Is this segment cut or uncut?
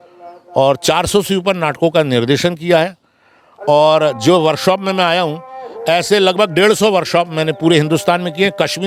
uncut